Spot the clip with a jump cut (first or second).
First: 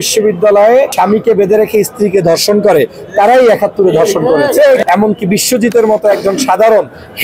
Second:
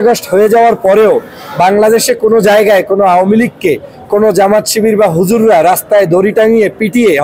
first